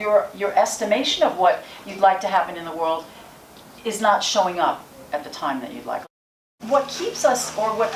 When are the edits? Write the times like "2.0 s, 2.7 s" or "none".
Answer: 6.1 s